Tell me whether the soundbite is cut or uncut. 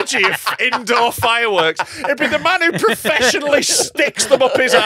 uncut